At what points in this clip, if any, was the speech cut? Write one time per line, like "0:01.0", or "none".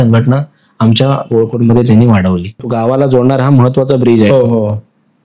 0:02.6